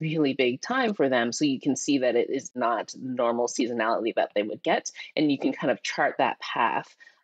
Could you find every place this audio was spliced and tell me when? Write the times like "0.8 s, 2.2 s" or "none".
2.5 s